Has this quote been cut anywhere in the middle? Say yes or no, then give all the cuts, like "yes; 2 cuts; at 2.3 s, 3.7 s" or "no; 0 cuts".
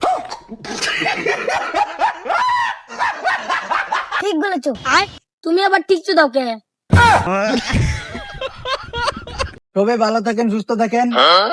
yes; 2 cuts; at 6.9 s, 9.6 s